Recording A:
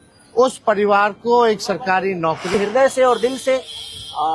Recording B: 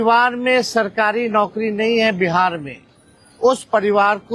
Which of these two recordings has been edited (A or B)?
A